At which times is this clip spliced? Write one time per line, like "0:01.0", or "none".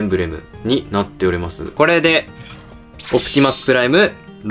0:01.6